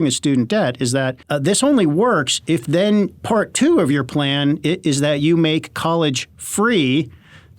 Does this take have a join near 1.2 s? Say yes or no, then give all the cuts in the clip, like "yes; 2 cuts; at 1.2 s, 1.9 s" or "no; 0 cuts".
yes; 1 cut; at 1.2 s